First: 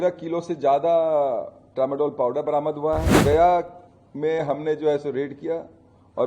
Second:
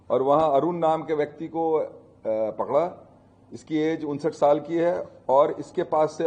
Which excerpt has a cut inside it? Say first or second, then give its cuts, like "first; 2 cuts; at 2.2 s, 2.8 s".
first; 1 cut; at 3.2 s